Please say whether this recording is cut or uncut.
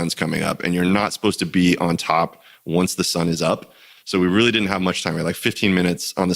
uncut